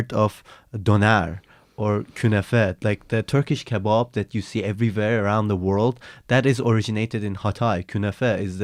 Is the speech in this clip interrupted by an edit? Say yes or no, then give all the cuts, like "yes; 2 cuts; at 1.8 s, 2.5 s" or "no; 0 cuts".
no; 0 cuts